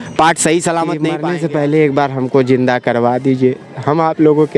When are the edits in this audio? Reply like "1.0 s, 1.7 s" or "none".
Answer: 1.2 s